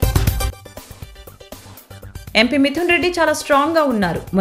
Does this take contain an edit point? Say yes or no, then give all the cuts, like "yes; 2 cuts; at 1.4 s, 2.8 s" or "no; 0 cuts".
yes; 1 cut; at 2.1 s